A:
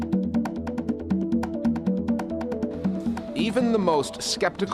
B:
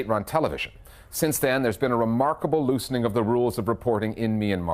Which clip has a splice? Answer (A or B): B